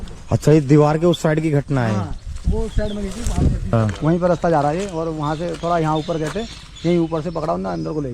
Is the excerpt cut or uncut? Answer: cut